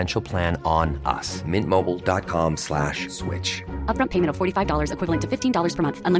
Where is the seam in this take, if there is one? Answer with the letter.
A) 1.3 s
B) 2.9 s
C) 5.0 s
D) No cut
D